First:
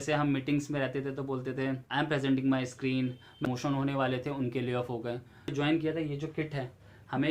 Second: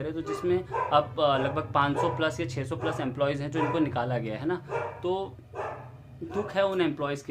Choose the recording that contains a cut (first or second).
first